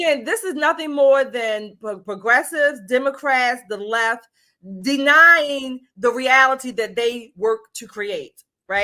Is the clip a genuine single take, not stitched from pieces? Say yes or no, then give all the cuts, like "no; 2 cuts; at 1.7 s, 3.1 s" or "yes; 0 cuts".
yes; 0 cuts